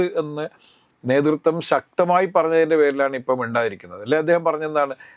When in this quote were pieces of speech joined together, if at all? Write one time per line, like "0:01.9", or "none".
none